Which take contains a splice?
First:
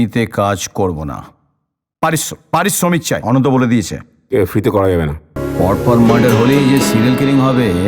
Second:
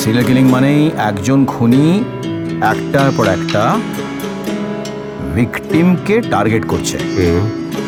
first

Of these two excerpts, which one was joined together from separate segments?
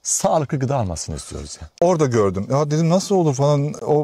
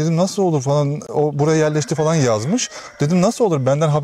first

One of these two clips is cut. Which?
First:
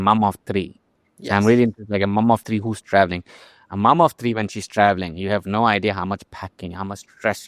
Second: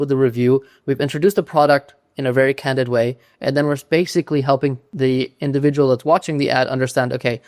second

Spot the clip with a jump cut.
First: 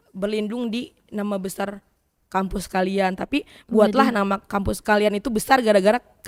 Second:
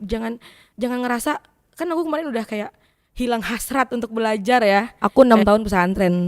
second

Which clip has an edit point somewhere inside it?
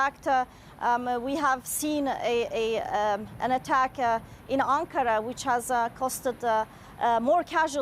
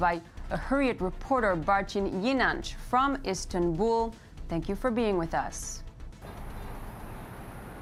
first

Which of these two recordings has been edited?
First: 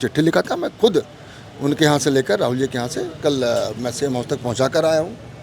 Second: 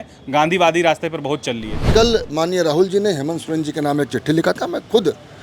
second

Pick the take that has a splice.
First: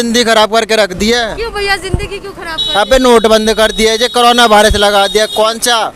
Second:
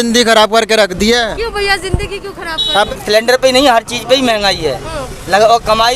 second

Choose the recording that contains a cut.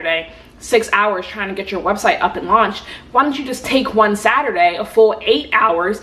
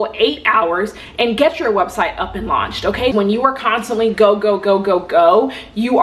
second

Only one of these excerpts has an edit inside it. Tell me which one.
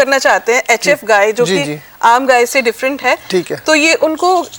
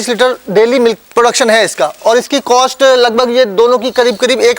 second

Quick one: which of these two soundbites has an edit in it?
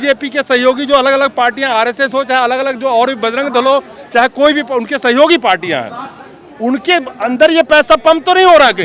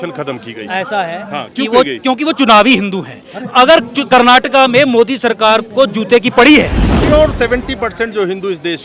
second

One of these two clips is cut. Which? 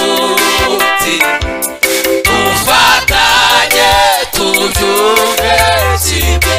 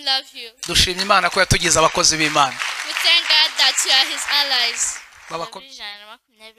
second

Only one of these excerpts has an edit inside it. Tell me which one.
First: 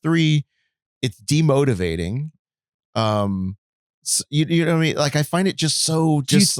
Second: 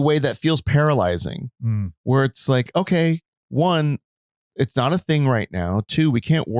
second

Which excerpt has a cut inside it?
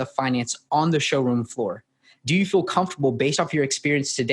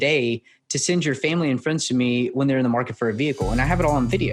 first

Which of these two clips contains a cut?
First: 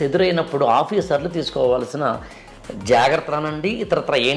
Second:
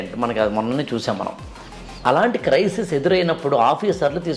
second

